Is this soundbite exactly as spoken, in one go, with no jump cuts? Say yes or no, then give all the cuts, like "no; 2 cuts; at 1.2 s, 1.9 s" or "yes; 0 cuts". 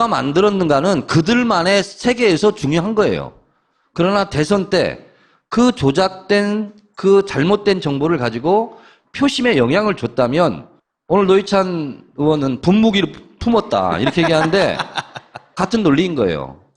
no; 1 cut; at 2.8 s